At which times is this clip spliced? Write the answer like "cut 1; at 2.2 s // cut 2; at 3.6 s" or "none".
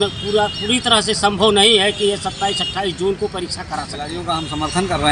cut 1; at 4.2 s